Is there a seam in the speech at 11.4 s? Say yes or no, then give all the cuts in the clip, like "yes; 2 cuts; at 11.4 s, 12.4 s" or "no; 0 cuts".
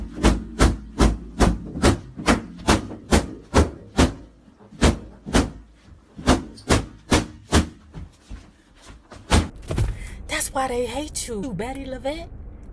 yes; 1 cut; at 11.4 s